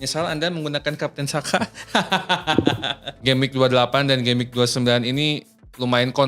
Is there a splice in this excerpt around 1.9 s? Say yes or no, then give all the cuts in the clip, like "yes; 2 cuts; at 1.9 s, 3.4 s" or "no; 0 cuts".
no; 1 cut; at 3.2 s